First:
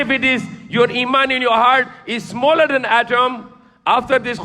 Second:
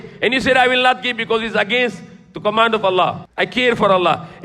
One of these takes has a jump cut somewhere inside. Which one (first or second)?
second